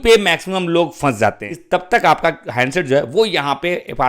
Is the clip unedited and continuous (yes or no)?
no